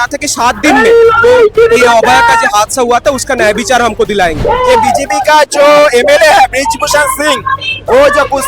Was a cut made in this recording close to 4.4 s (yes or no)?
yes